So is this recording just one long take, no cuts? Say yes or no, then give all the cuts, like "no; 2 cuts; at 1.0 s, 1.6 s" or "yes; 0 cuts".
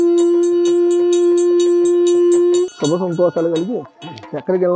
no; 1 cut; at 2.6 s